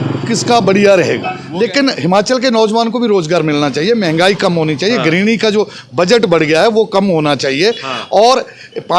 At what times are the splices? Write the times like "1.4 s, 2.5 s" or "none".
1.4 s